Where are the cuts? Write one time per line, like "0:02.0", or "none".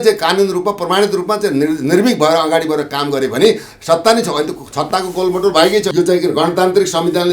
0:05.9